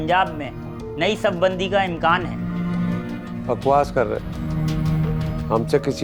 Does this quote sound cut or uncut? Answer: uncut